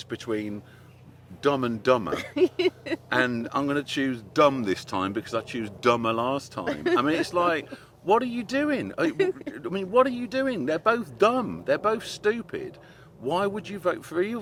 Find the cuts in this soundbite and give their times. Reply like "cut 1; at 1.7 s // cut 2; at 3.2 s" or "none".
none